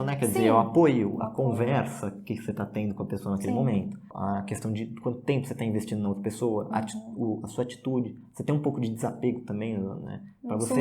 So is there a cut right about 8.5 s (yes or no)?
no